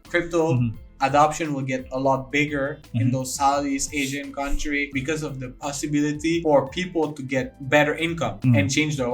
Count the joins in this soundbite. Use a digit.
4